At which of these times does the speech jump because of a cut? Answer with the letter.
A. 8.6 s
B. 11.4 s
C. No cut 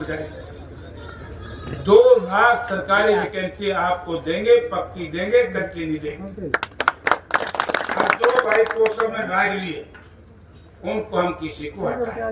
C